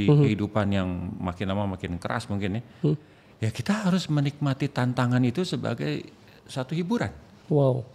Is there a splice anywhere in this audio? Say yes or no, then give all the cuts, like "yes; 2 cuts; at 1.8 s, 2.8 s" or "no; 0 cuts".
no; 0 cuts